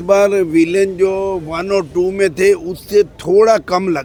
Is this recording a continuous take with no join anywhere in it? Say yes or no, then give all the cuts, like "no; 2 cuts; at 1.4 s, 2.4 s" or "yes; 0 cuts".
yes; 0 cuts